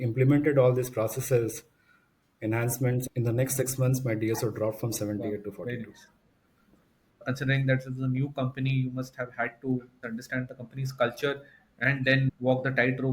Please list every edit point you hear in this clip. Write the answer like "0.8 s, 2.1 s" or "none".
3.0 s, 7.2 s, 10.0 s